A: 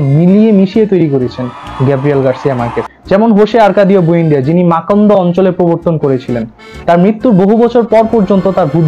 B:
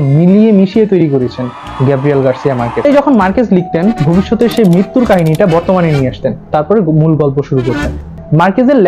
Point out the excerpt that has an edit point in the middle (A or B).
B